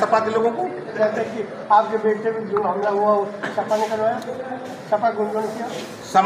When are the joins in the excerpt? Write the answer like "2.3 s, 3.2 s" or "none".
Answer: 0.9 s